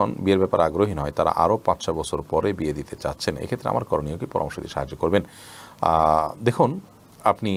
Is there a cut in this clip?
no; 0 cuts

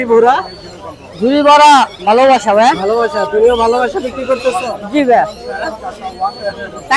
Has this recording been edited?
no; 0 cuts

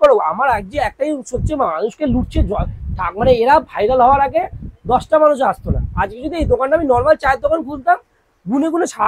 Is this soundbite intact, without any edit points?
yes; 0 cuts

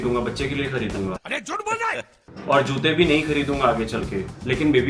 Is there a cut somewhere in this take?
no; 0 cuts

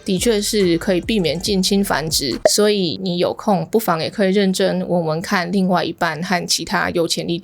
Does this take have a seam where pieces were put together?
yes; 1 cut; at 2.4 s

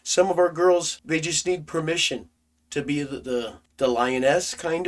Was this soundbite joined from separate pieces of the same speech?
yes; 2 cuts; at 0.9 s, 3.6 s

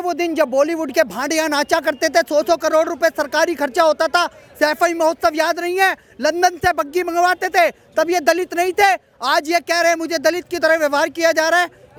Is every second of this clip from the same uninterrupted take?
yes; 0 cuts

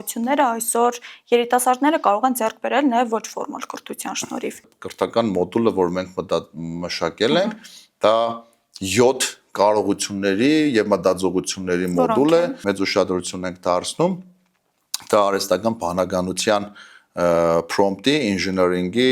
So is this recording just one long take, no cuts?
no; 2 cuts; at 4.8 s, 12.6 s

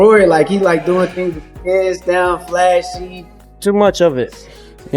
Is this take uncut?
no; 1 cut; at 3.6 s

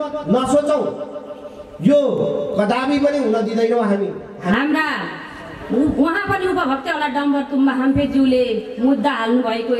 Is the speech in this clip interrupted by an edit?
yes; 1 cut; at 4.5 s

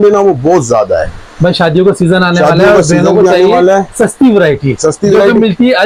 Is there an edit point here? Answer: no; 0 cuts

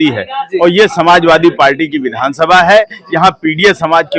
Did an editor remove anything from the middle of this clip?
no; 0 cuts

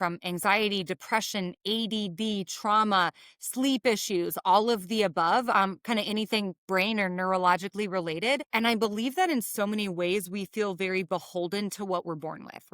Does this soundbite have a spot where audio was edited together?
yes; 1 cut; at 8.5 s

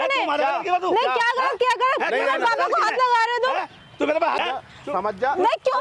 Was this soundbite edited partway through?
yes; 1 cut; at 4.4 s

